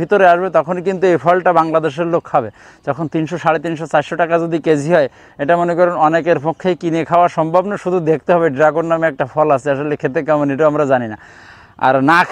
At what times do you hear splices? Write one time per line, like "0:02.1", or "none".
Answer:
none